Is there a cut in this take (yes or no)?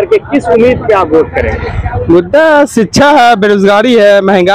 no